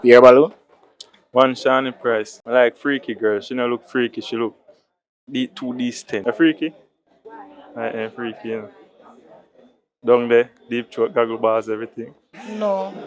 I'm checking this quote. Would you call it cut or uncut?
cut